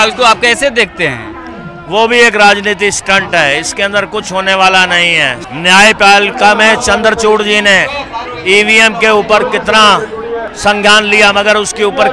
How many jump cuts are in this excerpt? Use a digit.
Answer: 2